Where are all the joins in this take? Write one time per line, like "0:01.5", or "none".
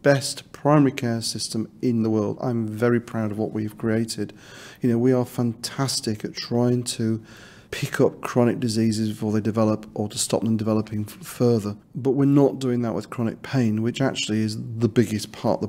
0:11.8